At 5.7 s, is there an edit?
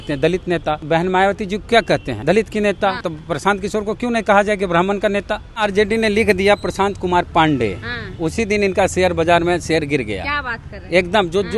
yes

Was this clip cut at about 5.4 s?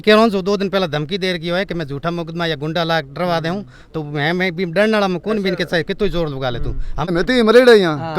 no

